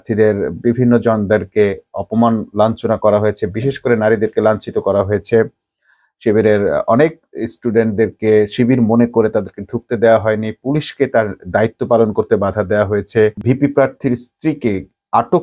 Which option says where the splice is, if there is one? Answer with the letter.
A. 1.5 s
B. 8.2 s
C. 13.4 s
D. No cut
C